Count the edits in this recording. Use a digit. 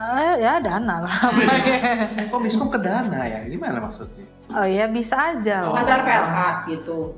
0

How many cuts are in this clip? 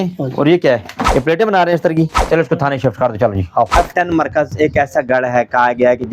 3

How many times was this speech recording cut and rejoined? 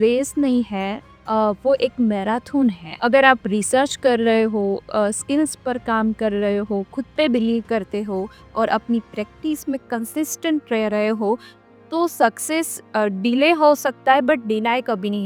0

